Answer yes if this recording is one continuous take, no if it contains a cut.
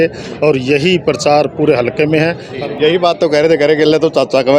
no